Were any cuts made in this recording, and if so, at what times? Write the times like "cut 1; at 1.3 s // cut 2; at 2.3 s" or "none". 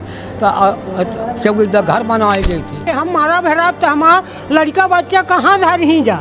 cut 1; at 2.8 s